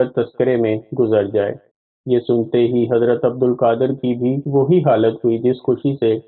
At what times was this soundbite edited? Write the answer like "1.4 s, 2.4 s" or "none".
1.6 s